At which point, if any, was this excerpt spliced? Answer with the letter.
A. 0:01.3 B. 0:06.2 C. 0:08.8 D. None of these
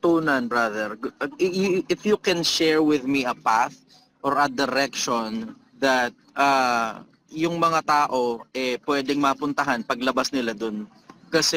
B